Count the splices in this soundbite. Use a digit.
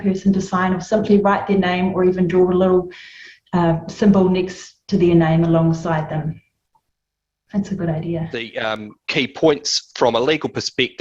1